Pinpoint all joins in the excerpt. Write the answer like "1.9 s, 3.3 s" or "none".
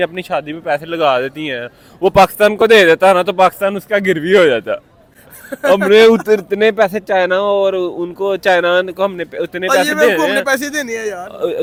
none

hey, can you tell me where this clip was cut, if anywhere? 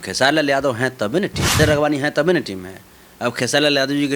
1.6 s

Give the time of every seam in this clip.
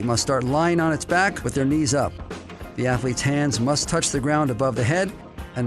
none

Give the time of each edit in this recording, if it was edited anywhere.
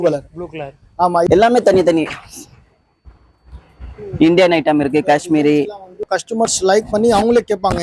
1.3 s, 6.1 s

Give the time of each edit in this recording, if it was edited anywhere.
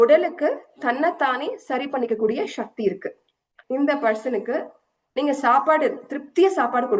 3.5 s

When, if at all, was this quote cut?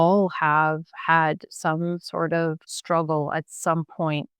2.7 s

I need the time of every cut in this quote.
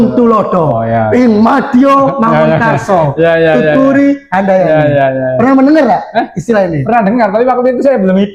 none

